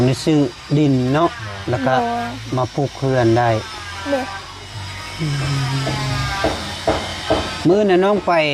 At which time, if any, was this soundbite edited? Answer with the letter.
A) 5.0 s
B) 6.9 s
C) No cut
C